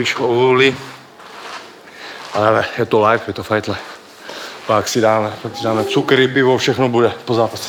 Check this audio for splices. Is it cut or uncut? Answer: uncut